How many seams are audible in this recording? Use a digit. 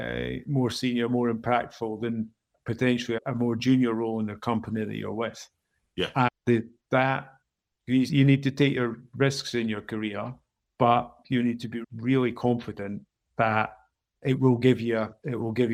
0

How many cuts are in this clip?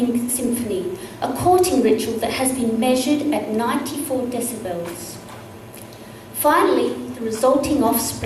1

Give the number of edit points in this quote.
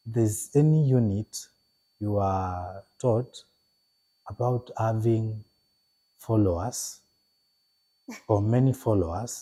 0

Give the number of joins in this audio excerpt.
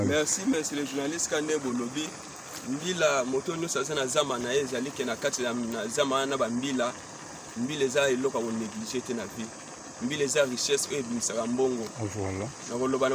0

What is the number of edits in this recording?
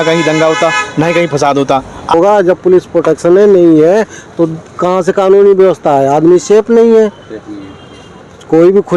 1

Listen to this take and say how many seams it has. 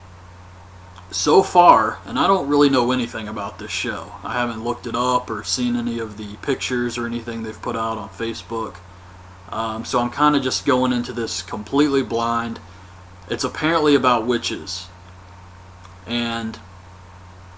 1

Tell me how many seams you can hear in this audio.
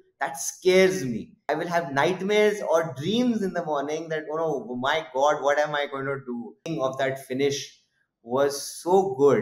2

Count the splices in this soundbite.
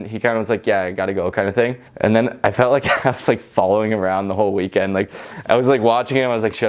1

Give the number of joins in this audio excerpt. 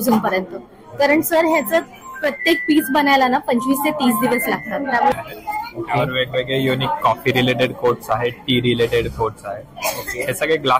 1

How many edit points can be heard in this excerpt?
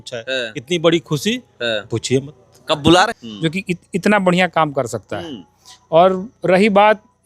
1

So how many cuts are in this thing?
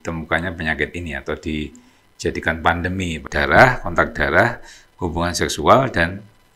1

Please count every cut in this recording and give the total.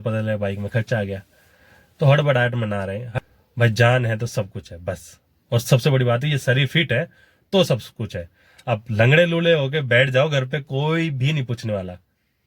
1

